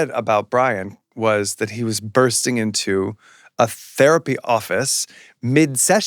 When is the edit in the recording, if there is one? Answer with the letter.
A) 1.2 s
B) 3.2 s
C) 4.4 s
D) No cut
C